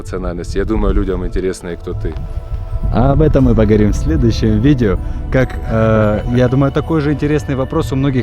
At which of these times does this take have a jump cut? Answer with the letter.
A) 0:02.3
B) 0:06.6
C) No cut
C